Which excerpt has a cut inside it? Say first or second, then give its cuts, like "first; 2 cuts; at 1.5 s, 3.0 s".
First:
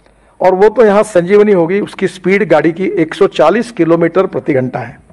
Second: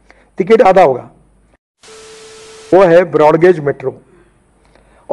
second; 1 cut; at 2.0 s